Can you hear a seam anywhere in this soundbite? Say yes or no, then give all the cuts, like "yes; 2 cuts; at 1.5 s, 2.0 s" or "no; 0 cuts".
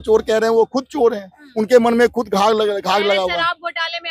no; 0 cuts